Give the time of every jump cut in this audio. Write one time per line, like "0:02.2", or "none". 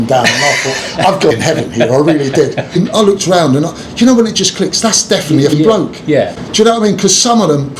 0:01.3
0:02.7
0:05.5